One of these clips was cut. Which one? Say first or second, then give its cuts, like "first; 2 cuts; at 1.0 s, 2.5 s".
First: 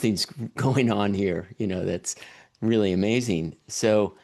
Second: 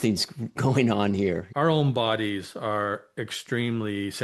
second; 1 cut; at 1.5 s